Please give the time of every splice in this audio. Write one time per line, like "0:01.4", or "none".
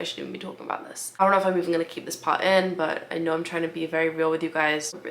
none